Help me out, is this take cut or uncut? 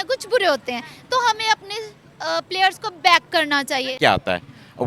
cut